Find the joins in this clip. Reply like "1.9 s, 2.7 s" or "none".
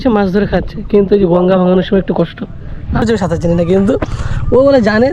3.0 s